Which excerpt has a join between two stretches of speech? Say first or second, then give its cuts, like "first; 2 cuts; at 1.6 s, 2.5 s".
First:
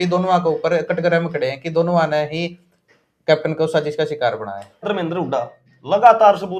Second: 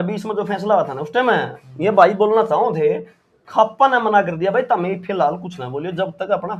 first; 1 cut; at 4.9 s